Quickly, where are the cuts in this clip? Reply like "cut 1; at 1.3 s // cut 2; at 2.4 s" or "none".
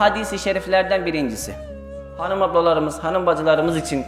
cut 1; at 1.8 s